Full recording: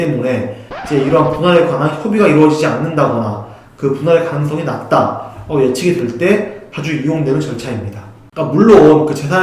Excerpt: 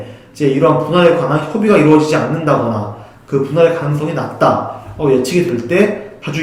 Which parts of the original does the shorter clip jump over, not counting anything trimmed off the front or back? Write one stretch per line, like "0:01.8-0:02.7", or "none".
none